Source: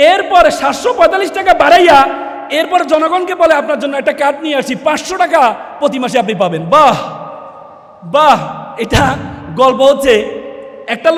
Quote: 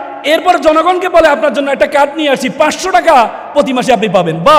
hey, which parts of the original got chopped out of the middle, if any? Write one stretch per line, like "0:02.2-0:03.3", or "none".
none